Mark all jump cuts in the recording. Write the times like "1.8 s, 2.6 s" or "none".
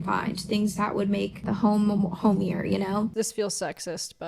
1.4 s, 3.1 s